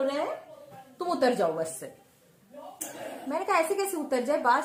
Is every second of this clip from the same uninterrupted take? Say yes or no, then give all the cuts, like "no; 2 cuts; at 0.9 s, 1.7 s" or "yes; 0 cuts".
yes; 0 cuts